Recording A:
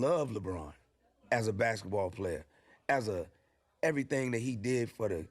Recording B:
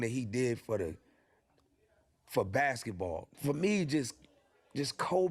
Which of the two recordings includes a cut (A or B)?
B